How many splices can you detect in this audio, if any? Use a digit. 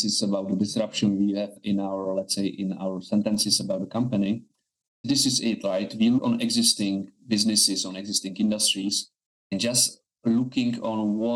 3